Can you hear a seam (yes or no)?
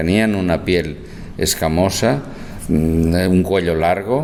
no